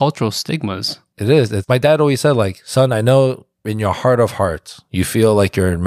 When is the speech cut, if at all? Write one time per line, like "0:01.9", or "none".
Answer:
none